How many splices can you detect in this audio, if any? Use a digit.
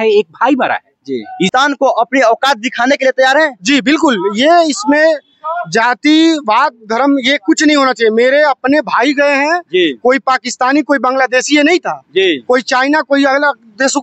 1